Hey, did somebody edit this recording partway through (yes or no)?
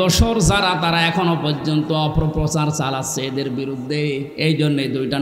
no